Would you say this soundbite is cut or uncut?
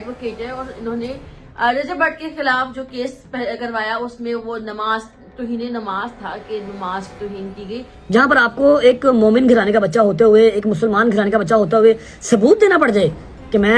cut